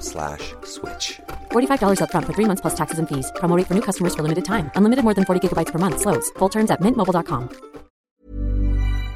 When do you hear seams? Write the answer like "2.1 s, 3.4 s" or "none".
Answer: 8.1 s